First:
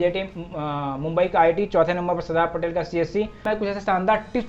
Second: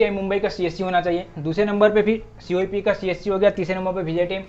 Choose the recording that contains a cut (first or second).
first